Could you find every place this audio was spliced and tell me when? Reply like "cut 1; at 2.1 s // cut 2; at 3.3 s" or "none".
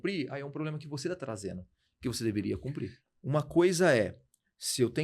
cut 1; at 3.0 s